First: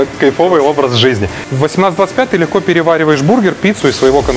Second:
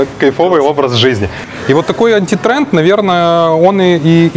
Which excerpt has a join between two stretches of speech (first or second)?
first